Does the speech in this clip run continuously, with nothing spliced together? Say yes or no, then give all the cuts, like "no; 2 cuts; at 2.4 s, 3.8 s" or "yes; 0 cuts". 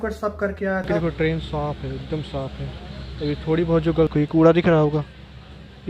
no; 2 cuts; at 0.9 s, 4.1 s